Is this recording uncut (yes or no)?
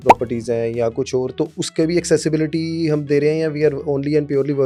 yes